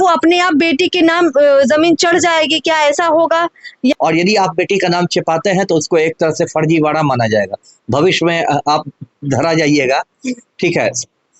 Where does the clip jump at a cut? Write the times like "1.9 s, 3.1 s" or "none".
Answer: 3.9 s

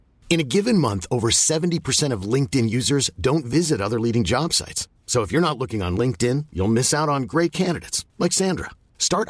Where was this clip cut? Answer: none

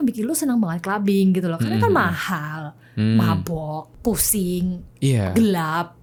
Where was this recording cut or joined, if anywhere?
none

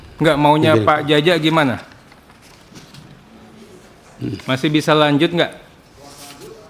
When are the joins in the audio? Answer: none

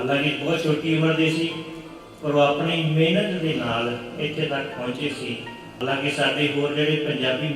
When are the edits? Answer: 5.8 s

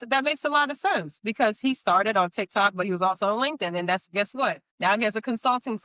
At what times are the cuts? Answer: 4.7 s

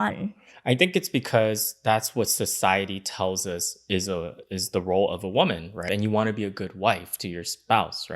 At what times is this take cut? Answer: 5.8 s

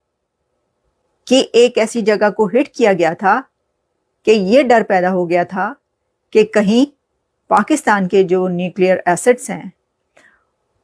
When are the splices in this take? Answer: none

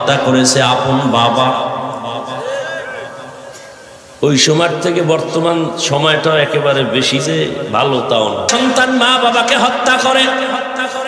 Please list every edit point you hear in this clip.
8.5 s

